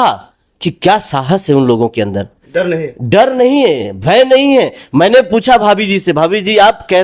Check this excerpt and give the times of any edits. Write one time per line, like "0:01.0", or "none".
none